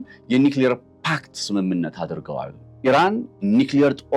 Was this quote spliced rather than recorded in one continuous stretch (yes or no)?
yes